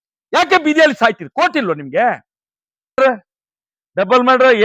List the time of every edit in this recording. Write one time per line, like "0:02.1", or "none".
0:03.0